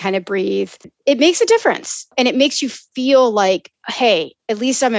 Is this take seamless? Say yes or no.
no